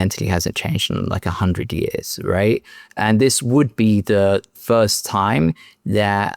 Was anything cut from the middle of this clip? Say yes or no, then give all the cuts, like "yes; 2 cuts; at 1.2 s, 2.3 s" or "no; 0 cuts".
yes; 1 cut; at 4.5 s